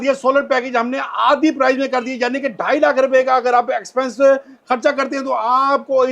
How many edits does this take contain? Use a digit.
0